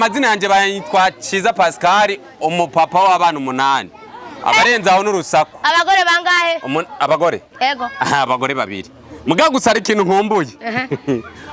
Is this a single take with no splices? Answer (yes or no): yes